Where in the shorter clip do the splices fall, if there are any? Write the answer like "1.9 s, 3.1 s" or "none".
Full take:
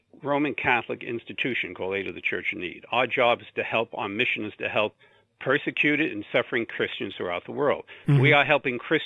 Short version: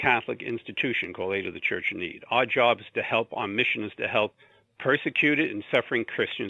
none